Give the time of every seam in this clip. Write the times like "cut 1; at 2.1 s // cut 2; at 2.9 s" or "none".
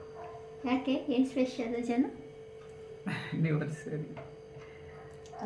none